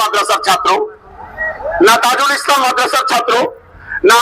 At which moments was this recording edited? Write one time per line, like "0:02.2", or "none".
none